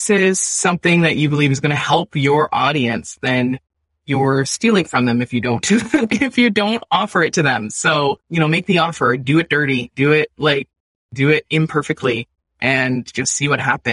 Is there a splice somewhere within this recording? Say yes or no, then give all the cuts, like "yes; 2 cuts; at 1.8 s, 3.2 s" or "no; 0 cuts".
yes; 1 cut; at 9.2 s